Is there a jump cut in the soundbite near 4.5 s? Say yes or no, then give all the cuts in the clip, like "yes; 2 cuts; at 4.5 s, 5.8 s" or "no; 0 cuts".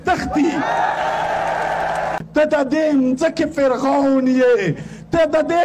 no; 1 cut; at 2.2 s